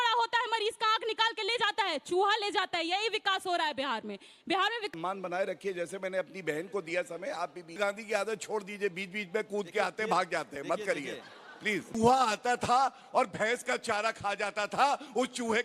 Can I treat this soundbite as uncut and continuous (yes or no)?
no